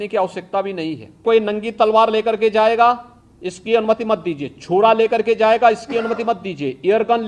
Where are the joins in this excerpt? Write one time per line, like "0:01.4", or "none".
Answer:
0:01.2